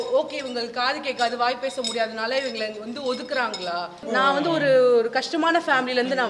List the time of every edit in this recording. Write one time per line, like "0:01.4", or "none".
0:04.1

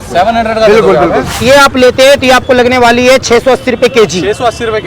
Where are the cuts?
0:01.4

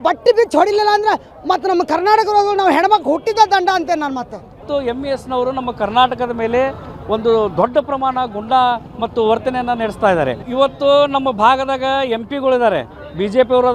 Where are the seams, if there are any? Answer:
0:04.6
0:10.5

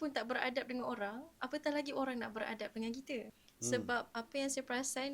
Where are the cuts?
0:03.4

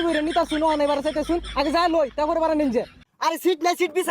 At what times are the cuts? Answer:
0:03.0

